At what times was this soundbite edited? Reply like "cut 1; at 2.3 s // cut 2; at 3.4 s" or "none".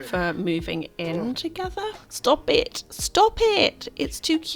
cut 1; at 2.1 s